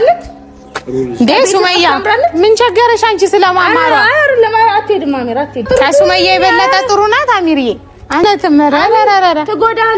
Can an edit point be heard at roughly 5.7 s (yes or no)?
yes